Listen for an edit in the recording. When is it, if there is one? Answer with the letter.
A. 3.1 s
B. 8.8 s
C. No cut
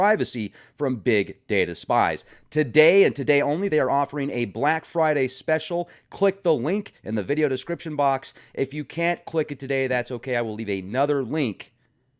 B